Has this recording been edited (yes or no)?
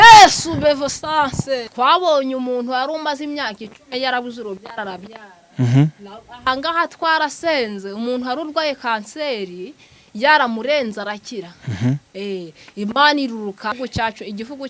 yes